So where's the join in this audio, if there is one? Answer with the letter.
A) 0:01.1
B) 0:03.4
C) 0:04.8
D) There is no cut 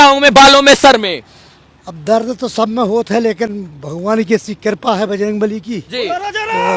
D